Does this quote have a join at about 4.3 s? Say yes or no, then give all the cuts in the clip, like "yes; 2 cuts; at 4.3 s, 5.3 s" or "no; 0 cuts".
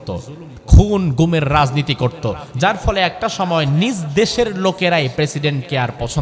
no; 1 cut; at 2.4 s